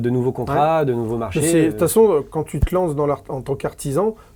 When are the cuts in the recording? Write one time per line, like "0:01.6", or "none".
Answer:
none